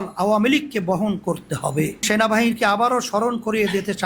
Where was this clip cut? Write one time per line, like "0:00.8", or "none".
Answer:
0:02.0